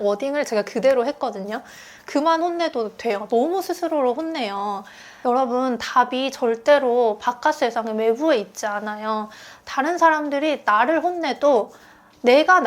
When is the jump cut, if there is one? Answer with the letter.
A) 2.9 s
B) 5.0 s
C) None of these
B